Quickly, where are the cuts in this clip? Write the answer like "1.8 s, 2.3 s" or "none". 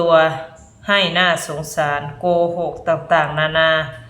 none